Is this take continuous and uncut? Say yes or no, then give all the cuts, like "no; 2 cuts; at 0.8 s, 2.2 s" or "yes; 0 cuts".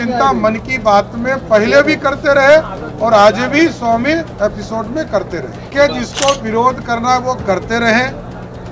no; 1 cut; at 5.6 s